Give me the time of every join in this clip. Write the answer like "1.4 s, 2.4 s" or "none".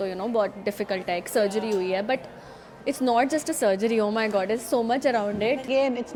none